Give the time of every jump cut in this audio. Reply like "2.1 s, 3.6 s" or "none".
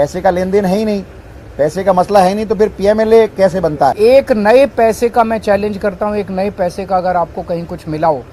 4.0 s